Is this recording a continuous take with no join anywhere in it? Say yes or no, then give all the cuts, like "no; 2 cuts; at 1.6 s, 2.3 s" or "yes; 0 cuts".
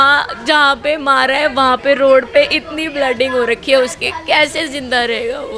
yes; 0 cuts